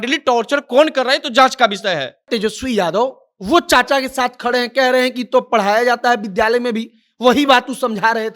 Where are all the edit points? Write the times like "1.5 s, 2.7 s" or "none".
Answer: 2.3 s